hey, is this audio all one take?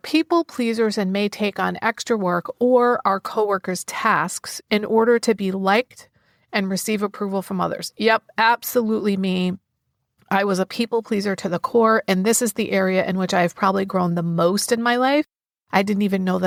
yes; 0 cuts

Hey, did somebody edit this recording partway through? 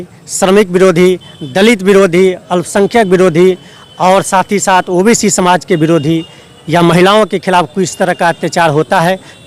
no; 0 cuts

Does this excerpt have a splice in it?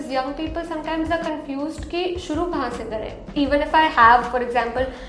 yes; 1 cut; at 3.2 s

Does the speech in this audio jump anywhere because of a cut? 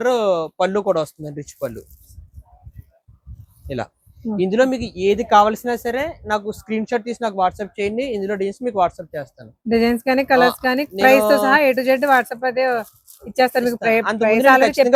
no; 0 cuts

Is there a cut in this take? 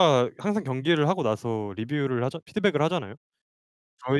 no; 0 cuts

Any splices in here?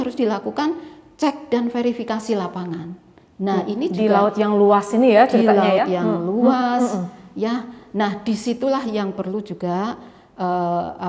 no; 0 cuts

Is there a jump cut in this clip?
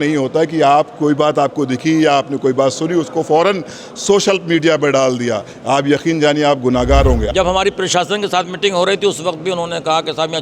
yes; 1 cut; at 7.3 s

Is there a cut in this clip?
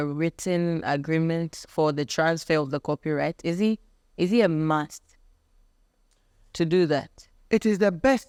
no; 0 cuts

